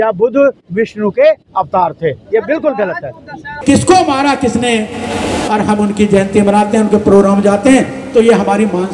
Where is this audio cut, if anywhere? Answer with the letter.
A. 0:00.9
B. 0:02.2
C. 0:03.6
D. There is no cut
C